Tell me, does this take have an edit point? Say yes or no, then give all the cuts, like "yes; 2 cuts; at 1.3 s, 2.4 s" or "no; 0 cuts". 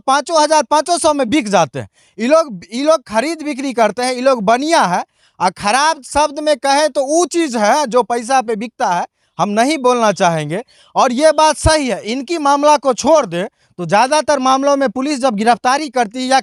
no; 0 cuts